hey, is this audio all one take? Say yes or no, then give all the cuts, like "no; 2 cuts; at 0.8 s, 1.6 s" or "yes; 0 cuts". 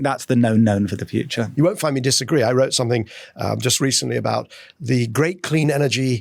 no; 1 cut; at 1.5 s